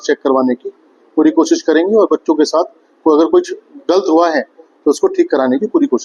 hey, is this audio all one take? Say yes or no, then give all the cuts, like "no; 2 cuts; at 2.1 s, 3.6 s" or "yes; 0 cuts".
yes; 0 cuts